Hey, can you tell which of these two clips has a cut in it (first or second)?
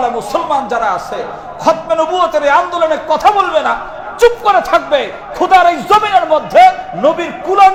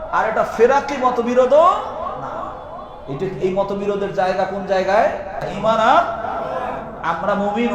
second